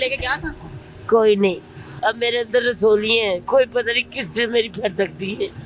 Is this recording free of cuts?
no; 2 cuts; at 2.0 s, 3.4 s

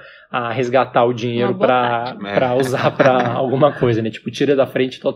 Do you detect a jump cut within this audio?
no; 0 cuts

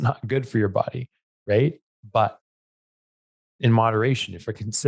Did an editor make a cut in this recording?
no; 0 cuts

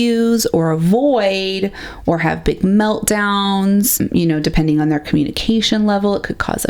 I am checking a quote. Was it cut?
yes; 1 cut; at 4.0 s

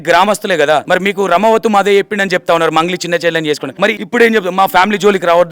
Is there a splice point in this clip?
yes; 2 cuts; at 0.8 s, 3.9 s

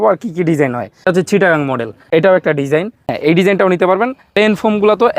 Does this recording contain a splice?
yes; 4 cuts; at 1.0 s, 1.9 s, 3.2 s, 4.3 s

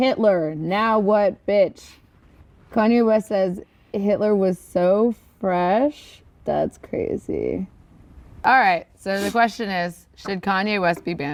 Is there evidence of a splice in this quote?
no; 0 cuts

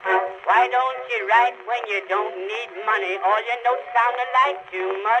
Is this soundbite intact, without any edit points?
yes; 0 cuts

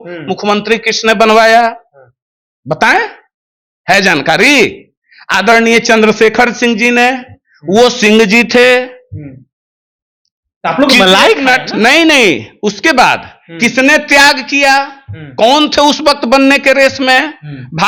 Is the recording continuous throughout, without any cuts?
yes; 0 cuts

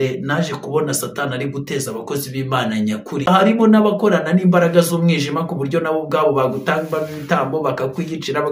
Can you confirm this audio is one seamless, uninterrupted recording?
no; 1 cut; at 3.3 s

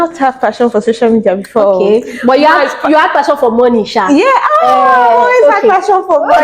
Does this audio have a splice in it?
no; 0 cuts

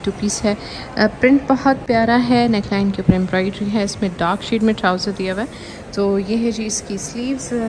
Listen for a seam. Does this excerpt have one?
no; 0 cuts

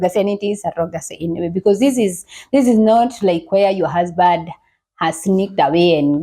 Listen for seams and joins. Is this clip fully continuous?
yes; 0 cuts

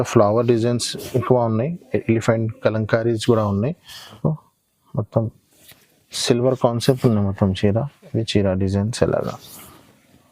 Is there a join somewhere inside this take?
yes; 1 cut; at 4.2 s

